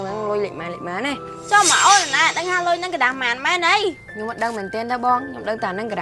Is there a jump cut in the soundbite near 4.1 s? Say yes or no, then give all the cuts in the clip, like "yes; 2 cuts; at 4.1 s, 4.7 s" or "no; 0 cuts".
yes; 2 cuts; at 1.3 s, 4.1 s